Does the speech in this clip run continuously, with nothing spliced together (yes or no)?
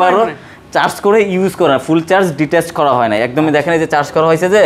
yes